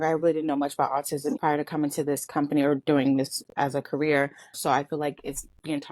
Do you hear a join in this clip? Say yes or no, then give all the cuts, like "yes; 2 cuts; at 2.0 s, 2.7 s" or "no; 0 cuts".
yes; 1 cut; at 4.5 s